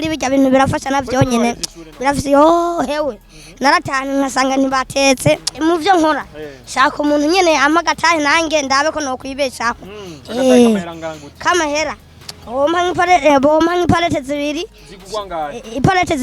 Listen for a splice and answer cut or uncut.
cut